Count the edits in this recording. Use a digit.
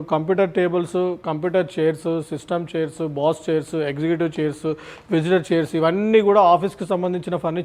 0